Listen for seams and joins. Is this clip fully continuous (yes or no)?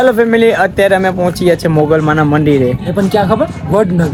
yes